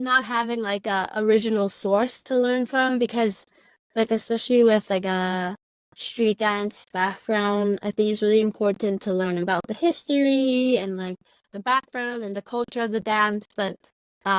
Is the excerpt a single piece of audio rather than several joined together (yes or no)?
yes